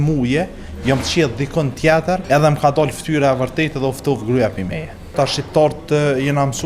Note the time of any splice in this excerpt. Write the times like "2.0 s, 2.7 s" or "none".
2.2 s, 5.1 s